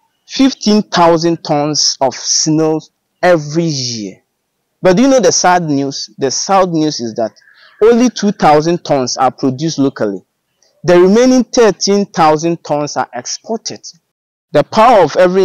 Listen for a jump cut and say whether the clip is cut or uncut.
cut